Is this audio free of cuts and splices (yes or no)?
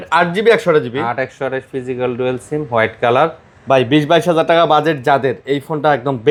yes